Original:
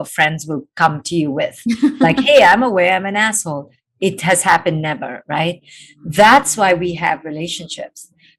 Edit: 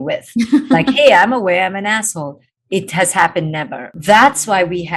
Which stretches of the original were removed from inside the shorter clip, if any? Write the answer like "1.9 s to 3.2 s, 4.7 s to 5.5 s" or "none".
5.1 s to 5.9 s